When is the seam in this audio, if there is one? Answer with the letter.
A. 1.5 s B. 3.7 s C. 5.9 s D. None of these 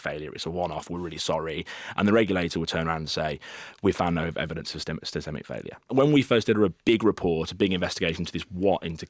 C